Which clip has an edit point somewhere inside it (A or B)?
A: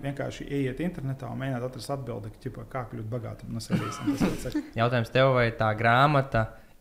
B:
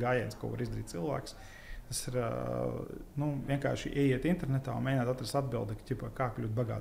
A